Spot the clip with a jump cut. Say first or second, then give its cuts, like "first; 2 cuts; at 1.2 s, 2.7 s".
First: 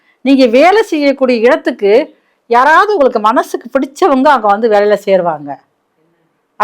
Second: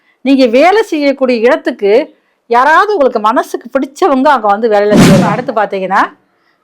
second; 1 cut; at 5.3 s